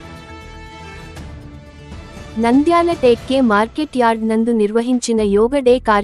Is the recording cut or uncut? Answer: cut